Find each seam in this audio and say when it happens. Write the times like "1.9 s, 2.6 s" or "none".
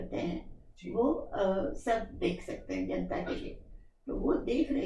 none